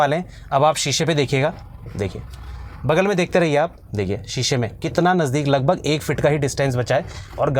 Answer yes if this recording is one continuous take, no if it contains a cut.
yes